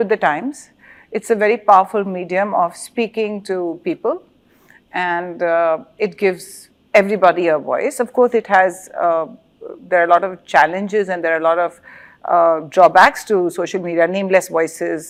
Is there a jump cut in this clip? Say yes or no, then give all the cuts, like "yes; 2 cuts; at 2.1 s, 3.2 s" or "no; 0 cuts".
no; 0 cuts